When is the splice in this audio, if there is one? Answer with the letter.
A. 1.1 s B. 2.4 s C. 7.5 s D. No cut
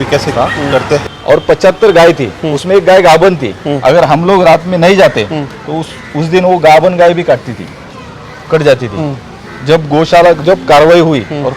A